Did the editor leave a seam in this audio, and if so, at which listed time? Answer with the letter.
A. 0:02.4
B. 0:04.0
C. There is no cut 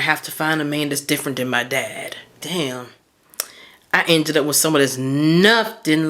A